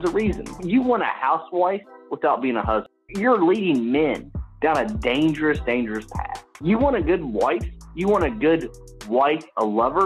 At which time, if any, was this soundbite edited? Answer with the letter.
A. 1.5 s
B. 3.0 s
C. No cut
B